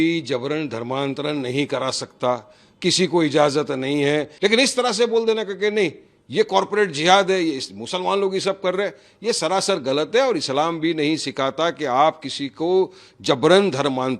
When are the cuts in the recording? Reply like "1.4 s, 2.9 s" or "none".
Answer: 4.3 s